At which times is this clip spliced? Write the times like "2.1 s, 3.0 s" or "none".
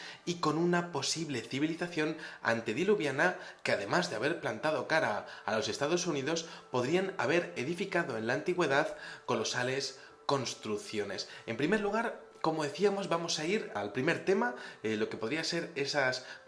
none